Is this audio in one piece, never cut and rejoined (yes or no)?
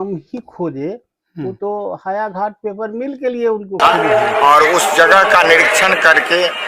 no